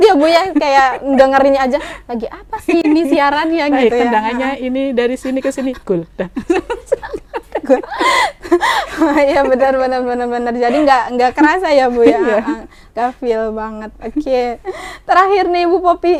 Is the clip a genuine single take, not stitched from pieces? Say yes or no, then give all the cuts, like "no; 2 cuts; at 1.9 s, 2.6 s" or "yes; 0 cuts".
yes; 0 cuts